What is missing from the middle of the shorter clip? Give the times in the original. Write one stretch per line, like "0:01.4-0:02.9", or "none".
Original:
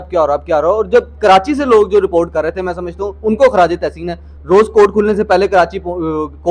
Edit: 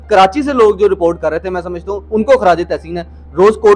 none